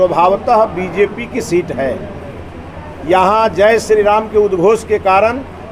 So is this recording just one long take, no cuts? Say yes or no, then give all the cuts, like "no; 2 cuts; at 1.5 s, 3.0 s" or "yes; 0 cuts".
yes; 0 cuts